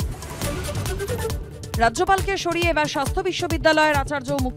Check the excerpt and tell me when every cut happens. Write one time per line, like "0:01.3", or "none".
none

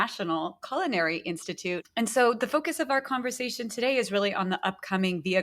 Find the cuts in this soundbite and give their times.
0:01.8

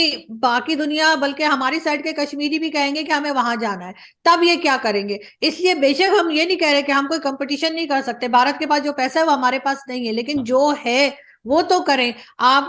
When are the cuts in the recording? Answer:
none

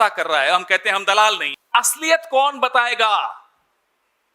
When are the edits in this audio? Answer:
0:01.5

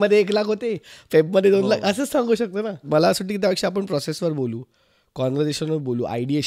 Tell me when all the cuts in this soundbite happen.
0:02.9

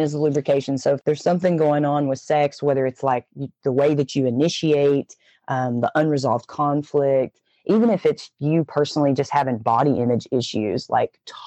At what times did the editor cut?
0:01.0

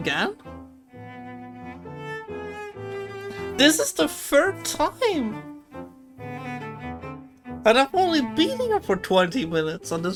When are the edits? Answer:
none

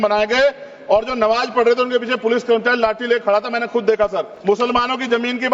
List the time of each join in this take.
0:04.3

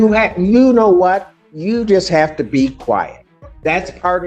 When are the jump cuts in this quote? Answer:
none

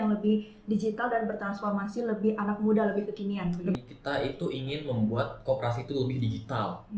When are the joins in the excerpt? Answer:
0:03.8

